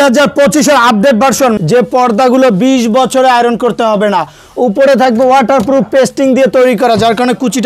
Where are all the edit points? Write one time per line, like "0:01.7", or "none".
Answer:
0:01.6